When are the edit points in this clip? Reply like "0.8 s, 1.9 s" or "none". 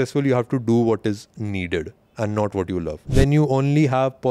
3.0 s